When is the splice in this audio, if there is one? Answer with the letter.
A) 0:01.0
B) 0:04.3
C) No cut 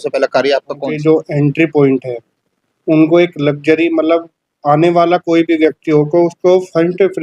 A